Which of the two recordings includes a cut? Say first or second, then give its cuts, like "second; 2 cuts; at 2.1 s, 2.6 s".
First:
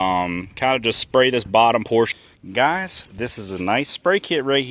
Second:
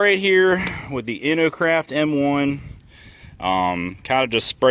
first; 1 cut; at 2.1 s